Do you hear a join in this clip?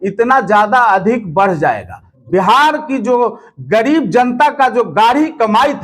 yes; 1 cut; at 2.1 s

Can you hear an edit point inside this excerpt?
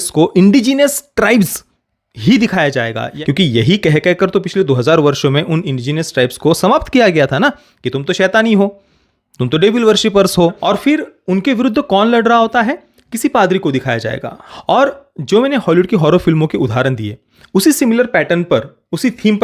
yes; 3 cuts; at 3.0 s, 10.6 s, 14.4 s

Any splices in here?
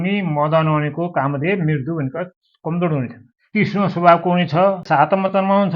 yes; 1 cut; at 4.8 s

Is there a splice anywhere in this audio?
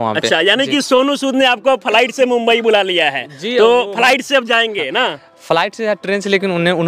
no; 0 cuts

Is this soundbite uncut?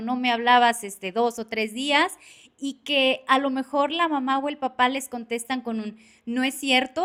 yes; 0 cuts

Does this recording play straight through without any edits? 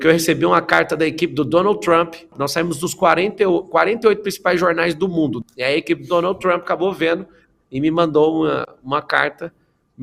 no; 2 cuts; at 2.3 s, 5.4 s

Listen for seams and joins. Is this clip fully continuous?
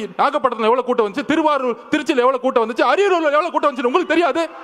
yes; 0 cuts

